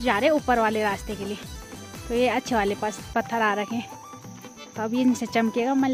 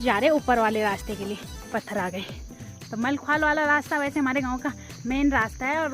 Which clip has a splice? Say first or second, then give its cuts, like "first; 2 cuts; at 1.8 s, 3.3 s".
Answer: second; 1 cut; at 1.7 s